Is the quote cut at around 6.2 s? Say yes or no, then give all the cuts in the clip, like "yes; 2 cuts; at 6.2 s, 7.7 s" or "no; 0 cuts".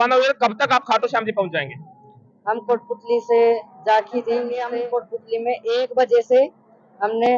no; 1 cut; at 4.7 s